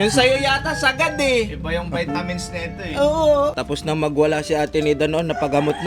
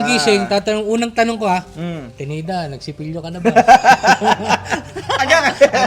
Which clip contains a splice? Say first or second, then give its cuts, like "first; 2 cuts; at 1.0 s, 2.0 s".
first; 1 cut; at 3.6 s